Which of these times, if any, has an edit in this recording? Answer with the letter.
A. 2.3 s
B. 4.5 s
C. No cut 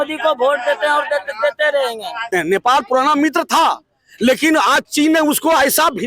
A